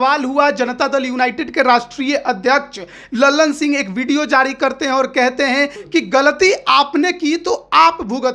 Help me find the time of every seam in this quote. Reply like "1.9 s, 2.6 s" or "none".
5.8 s